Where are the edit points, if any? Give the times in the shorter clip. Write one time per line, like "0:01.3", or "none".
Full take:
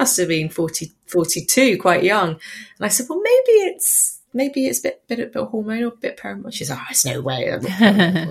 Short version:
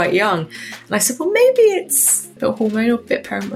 0:02.4